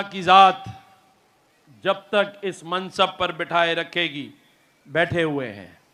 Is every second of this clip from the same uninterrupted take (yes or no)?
yes